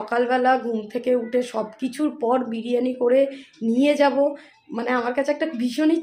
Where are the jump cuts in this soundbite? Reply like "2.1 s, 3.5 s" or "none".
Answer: none